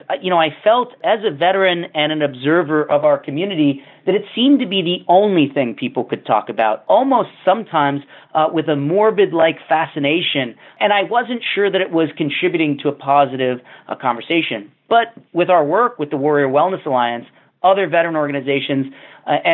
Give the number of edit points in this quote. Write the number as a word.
three